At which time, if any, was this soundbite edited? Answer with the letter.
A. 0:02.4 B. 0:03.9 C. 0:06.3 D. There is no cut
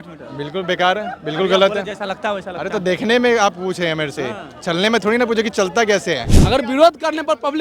C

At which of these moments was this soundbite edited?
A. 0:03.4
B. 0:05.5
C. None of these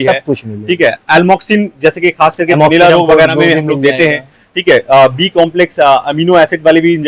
C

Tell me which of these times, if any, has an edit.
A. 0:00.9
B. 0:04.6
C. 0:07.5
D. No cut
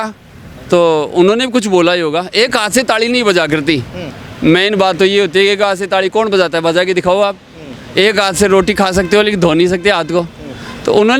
D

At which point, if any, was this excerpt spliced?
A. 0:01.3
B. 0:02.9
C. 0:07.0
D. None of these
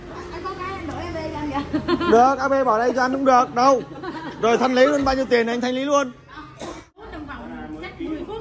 C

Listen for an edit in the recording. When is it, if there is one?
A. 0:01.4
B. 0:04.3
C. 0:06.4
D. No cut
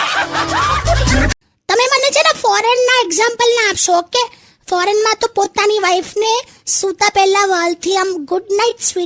A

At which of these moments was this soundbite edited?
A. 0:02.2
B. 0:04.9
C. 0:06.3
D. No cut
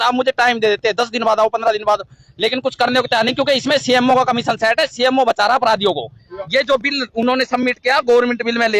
C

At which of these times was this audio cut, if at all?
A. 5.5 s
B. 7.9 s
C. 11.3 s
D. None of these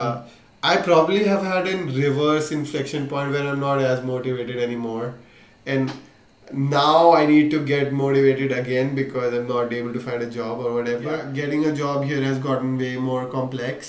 C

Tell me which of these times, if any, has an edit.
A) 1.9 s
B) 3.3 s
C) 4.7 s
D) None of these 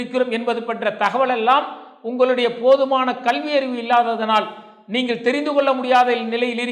D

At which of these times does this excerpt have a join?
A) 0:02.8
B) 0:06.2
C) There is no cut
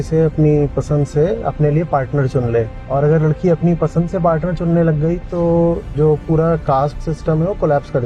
A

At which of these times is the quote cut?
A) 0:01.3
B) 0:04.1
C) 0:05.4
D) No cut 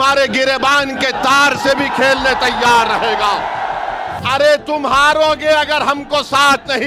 B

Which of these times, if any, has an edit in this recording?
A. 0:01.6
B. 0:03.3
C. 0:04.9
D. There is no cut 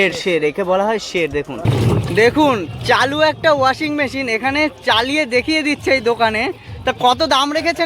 A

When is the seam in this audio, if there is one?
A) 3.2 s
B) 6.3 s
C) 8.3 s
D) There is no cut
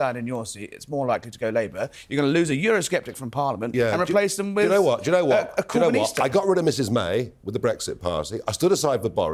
D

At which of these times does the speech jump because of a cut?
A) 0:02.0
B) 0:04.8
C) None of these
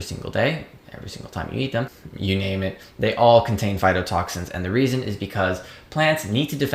A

